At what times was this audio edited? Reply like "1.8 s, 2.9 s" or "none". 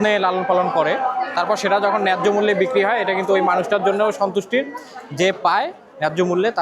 none